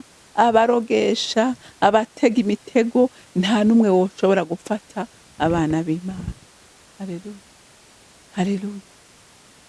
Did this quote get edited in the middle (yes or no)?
no